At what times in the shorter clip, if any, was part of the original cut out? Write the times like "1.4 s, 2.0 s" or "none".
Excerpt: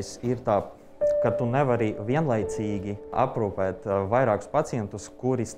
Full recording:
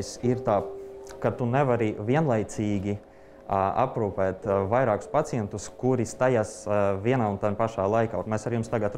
3.1 s